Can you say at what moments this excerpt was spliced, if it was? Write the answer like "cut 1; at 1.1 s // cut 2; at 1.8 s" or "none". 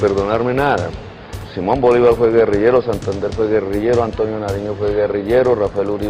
cut 1; at 1.4 s